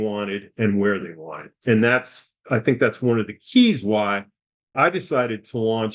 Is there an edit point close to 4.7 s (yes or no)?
yes